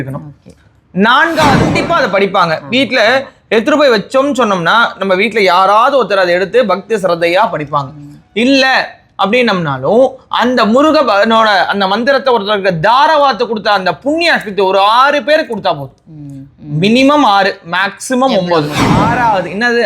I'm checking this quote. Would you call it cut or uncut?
cut